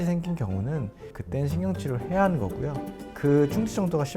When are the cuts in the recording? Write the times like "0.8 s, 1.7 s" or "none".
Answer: 1.1 s, 3.2 s